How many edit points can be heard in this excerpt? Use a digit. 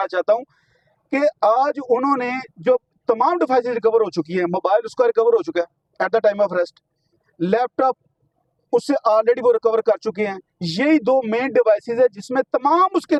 0